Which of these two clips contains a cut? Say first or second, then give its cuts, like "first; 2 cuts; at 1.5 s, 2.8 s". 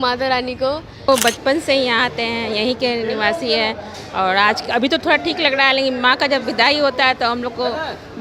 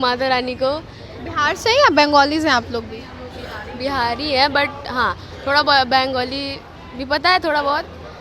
first; 1 cut; at 1.1 s